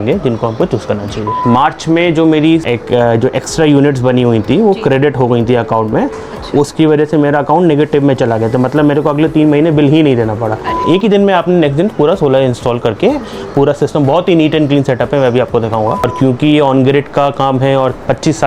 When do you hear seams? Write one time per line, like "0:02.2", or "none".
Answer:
0:01.4
0:02.7
0:10.8
0:16.1